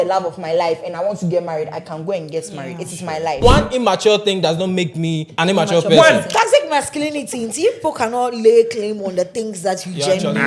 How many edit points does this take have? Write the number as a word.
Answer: three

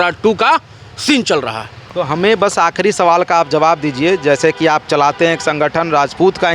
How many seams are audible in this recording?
zero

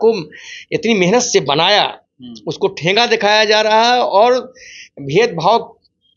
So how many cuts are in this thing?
zero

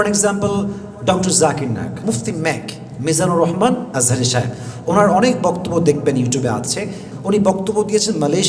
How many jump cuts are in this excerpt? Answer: two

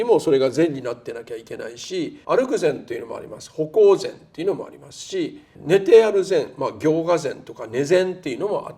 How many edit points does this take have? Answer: two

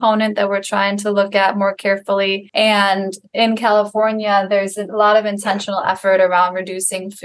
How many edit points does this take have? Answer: one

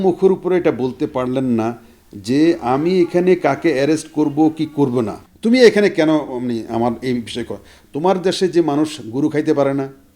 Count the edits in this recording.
one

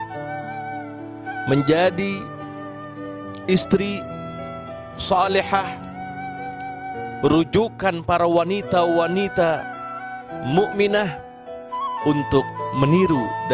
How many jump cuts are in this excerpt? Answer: two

